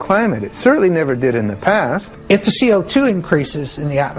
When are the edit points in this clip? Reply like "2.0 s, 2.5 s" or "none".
2.1 s